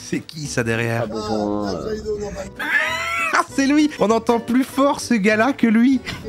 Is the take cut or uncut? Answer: cut